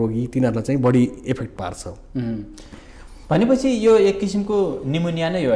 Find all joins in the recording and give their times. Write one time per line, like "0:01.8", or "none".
none